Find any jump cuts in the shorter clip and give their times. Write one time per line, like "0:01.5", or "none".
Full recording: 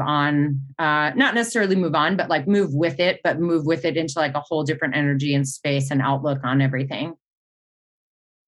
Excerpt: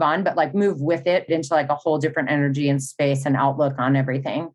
0:01.3